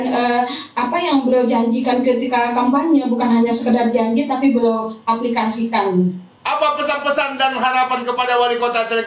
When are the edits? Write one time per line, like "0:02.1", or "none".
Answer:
0:06.3